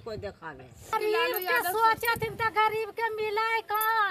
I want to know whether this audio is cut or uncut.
cut